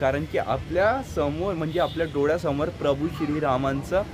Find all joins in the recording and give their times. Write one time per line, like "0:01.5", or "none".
none